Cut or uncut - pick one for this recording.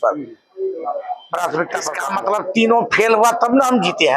cut